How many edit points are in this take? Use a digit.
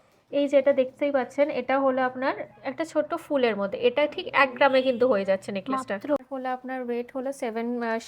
1